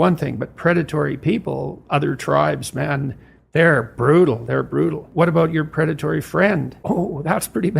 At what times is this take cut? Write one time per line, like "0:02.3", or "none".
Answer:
0:05.0
0:06.7